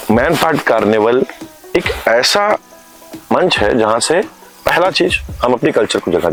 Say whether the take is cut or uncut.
uncut